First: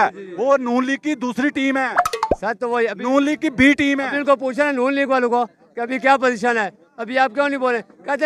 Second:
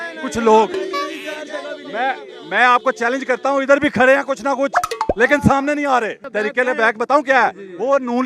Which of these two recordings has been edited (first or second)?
second